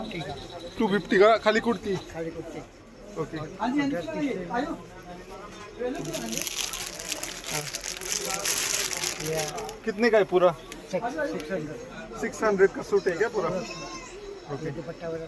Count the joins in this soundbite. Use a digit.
0